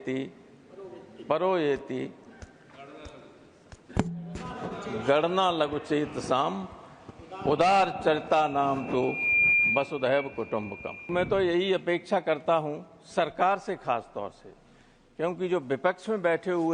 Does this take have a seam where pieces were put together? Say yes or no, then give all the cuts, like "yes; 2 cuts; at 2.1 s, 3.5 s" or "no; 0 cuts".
yes; 1 cut; at 11.1 s